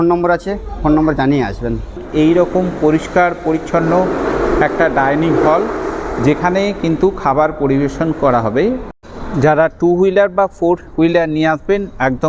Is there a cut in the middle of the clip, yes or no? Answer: yes